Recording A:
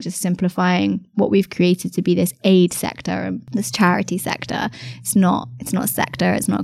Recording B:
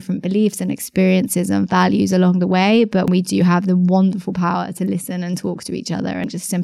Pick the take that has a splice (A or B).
A